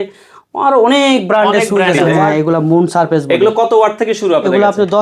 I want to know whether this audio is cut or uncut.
cut